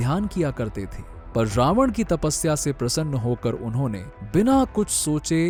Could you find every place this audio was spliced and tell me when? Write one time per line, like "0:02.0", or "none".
none